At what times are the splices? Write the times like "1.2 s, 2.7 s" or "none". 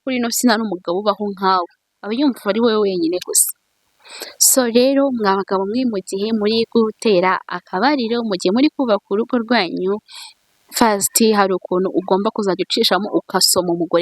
none